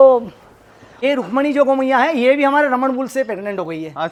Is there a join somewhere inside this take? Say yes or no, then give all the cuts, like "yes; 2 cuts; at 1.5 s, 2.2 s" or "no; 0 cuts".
no; 0 cuts